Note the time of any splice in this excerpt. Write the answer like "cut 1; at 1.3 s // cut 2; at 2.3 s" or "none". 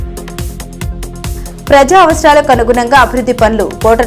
cut 1; at 1.3 s